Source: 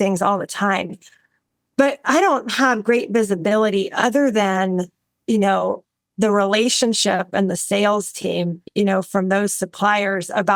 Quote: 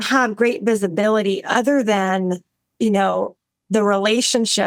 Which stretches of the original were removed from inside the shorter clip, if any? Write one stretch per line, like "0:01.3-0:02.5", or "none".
none